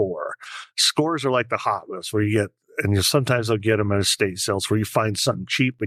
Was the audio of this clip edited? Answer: no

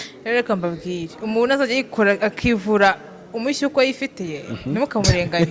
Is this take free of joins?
yes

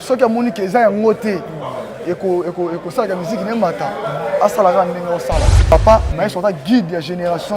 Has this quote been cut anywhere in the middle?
yes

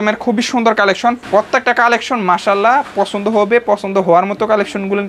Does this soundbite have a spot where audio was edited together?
yes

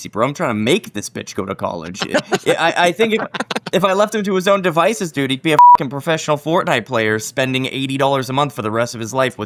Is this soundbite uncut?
yes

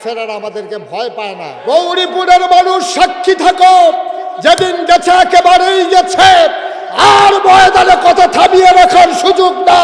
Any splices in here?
yes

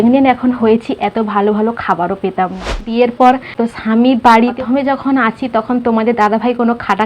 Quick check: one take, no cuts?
no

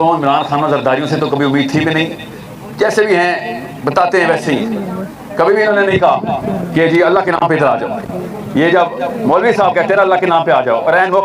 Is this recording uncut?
yes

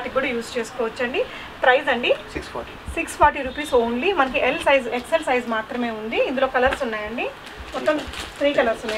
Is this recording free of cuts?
yes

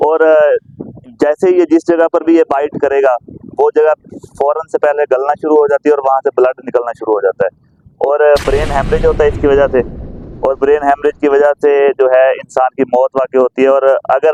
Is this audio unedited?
yes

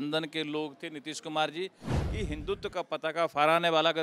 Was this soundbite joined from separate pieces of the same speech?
yes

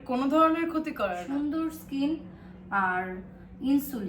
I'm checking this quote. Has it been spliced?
yes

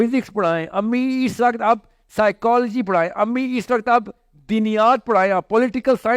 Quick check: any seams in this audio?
no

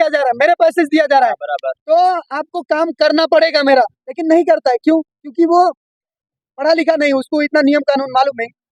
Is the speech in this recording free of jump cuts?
yes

